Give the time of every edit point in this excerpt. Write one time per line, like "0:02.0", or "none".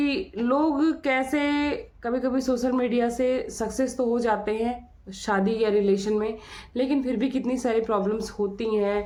none